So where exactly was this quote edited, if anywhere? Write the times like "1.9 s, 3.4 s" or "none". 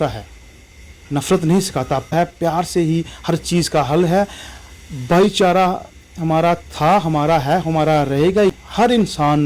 8.6 s